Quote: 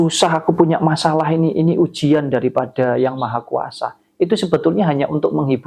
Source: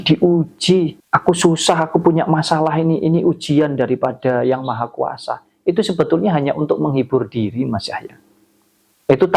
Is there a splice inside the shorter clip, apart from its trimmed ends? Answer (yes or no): no